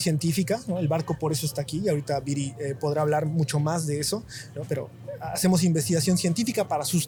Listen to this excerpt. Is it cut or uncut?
uncut